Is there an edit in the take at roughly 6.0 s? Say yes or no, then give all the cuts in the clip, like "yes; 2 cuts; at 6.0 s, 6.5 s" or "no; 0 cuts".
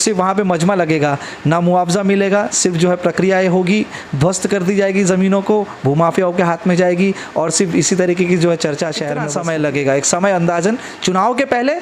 no; 1 cut; at 9.1 s